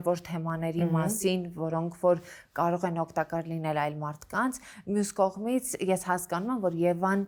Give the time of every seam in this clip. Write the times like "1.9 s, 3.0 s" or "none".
none

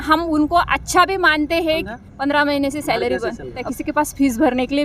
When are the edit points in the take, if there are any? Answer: 1.9 s, 3.7 s

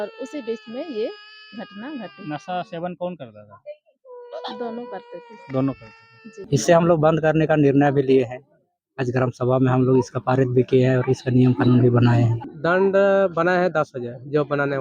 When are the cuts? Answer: 6.5 s, 12.5 s

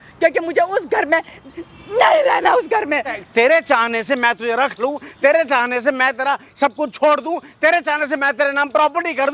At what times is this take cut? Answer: 3.2 s

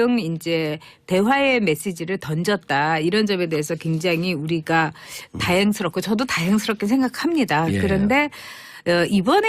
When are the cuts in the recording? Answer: 2.9 s

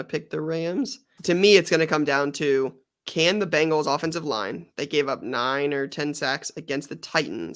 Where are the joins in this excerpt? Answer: 1.1 s

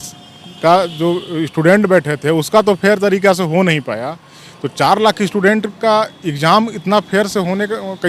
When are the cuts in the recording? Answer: none

